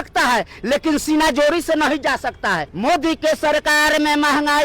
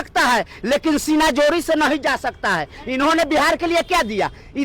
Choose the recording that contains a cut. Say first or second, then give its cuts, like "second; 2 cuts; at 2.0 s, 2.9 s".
first; 1 cut; at 2.7 s